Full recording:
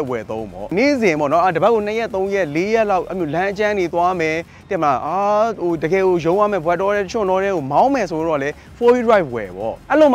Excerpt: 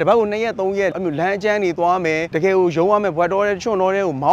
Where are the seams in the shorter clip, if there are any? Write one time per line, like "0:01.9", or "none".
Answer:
0:00.9
0:02.3

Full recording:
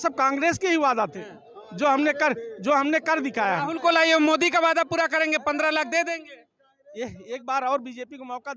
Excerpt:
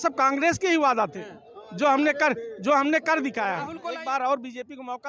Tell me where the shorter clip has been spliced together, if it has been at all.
0:03.7

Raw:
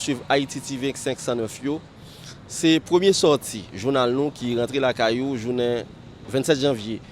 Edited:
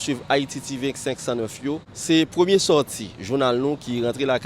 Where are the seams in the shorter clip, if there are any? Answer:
0:01.9

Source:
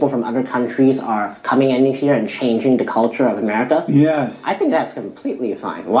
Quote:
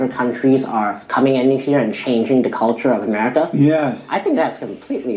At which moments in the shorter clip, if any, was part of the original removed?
none

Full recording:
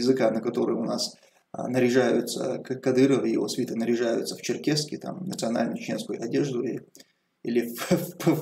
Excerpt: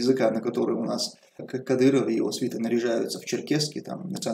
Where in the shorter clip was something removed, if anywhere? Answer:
0:01.5

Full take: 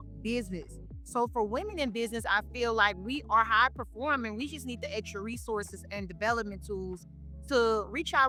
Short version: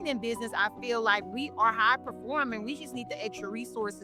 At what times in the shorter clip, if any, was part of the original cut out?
none

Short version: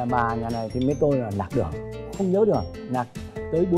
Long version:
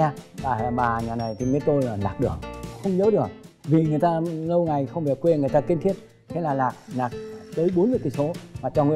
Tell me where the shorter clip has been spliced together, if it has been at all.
0:02.8

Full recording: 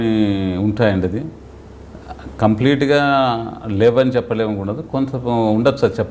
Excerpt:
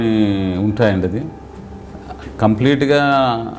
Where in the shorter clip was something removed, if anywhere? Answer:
none

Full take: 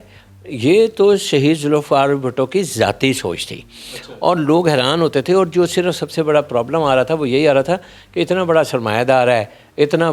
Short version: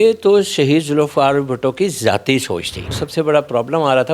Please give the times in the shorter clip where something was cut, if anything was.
0:03.0

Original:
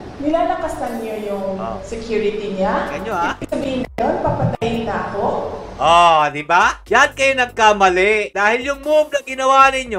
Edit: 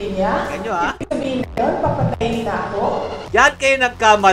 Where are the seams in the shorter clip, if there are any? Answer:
0:03.2

